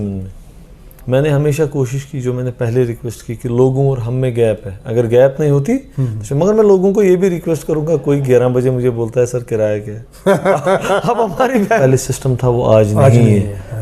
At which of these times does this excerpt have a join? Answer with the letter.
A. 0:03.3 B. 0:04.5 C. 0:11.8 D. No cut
C